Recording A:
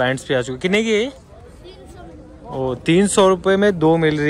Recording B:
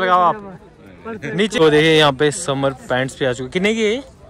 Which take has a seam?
B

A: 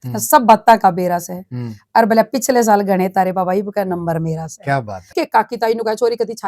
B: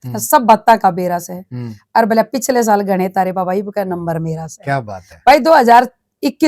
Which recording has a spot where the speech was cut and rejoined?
A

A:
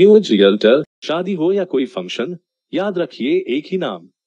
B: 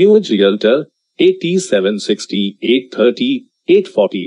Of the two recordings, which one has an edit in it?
A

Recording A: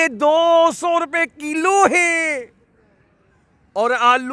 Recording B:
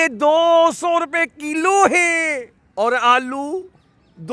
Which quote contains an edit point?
B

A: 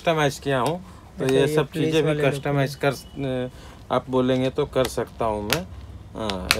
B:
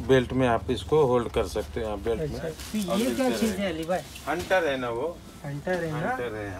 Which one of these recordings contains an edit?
B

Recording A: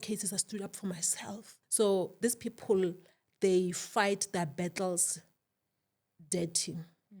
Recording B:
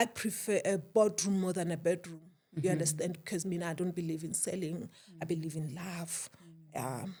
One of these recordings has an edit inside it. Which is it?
A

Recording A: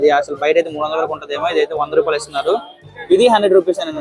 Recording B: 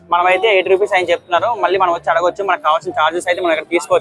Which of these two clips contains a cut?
A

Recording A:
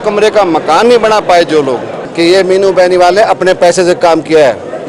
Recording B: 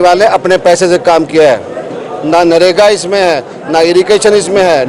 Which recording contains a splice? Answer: A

